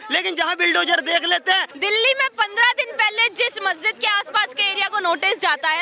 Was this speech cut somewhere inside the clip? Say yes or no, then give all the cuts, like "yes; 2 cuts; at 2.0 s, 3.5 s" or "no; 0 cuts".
yes; 1 cut; at 1.7 s